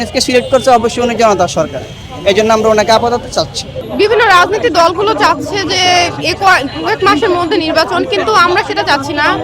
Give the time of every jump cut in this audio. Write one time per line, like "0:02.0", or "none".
none